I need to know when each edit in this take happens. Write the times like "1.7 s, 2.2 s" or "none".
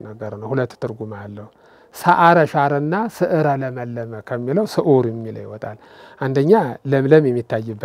none

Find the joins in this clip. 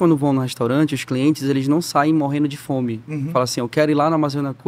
none

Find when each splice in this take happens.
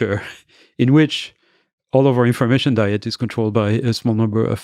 none

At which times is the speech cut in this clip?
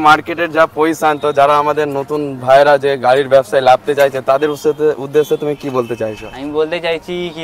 none

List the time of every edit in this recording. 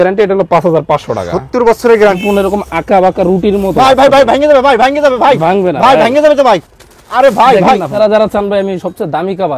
2.2 s, 7.9 s

